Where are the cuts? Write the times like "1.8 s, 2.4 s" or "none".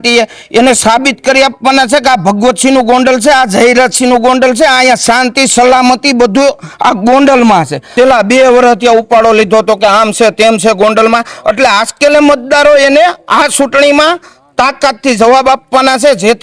7.8 s